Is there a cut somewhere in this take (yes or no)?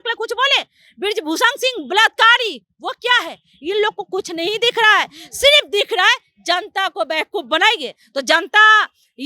no